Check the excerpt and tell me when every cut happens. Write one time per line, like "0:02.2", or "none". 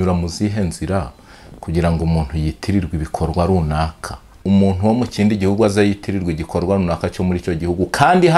0:04.3